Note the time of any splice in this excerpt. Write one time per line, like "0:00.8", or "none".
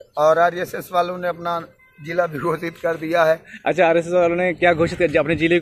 none